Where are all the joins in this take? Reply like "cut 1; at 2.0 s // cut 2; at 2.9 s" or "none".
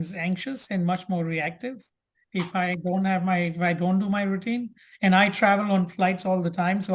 none